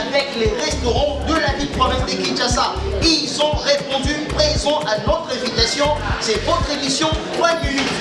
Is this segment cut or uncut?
uncut